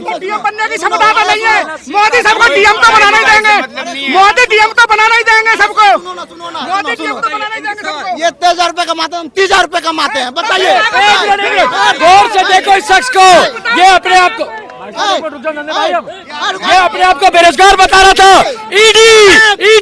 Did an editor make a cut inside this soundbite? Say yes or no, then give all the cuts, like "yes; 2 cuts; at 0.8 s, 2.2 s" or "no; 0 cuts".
no; 0 cuts